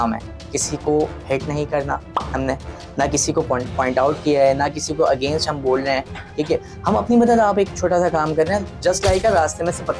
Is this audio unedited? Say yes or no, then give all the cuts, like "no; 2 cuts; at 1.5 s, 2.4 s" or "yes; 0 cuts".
yes; 0 cuts